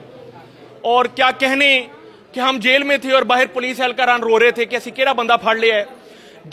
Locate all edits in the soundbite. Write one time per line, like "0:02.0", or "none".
none